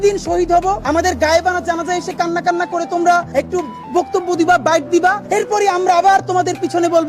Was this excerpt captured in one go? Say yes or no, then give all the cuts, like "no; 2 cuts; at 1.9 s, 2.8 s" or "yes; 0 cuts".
no; 3 cuts; at 0.8 s, 3.3 s, 5.2 s